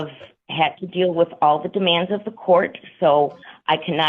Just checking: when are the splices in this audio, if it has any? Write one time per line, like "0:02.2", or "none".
none